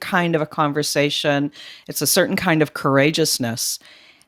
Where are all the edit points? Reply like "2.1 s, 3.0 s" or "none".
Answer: none